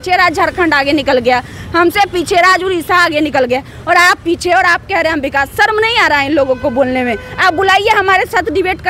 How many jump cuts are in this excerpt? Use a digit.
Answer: 0